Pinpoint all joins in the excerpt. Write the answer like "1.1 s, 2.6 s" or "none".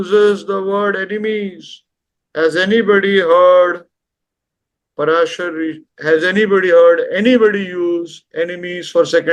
none